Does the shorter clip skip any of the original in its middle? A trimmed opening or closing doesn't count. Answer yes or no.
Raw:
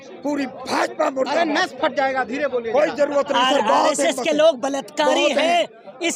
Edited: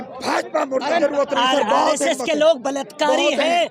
yes